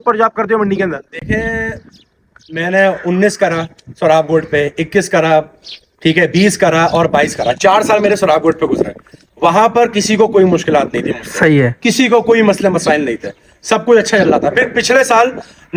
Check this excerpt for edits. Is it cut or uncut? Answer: uncut